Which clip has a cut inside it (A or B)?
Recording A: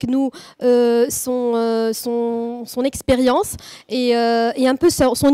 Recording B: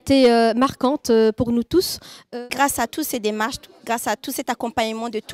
B